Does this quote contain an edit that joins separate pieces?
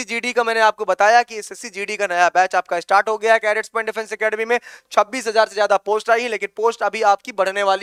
no; 0 cuts

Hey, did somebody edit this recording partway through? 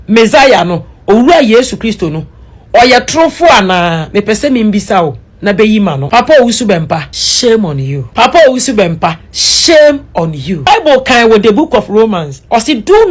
no; 0 cuts

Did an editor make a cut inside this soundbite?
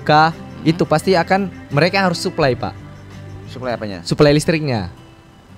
no; 0 cuts

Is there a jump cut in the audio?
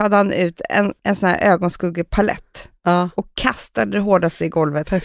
yes; 1 cut; at 1.0 s

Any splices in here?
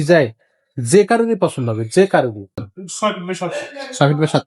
yes; 1 cut; at 2.7 s

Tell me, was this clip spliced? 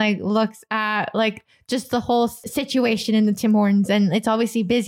yes; 1 cut; at 2.4 s

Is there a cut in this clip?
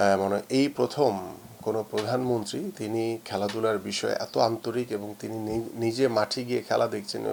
no; 0 cuts

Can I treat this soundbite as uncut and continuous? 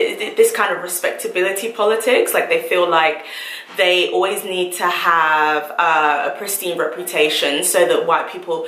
yes; 0 cuts

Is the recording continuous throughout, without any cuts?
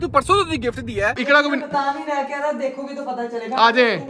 no; 1 cut; at 1.1 s

